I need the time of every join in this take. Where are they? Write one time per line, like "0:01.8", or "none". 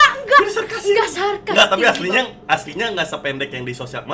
none